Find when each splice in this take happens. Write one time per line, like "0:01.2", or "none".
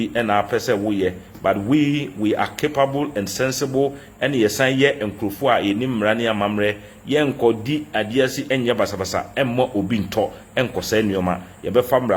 none